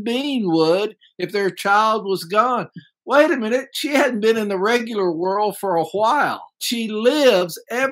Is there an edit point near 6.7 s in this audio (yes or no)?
yes